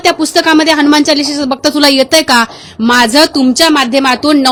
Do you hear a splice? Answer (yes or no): no